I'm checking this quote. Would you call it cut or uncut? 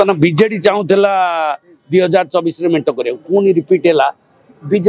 uncut